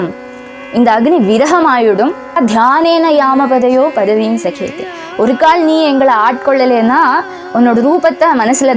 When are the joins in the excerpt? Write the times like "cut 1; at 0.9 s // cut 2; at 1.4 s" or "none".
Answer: cut 1; at 2.4 s